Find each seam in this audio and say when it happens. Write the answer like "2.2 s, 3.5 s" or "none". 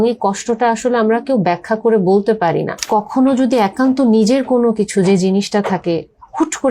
2.8 s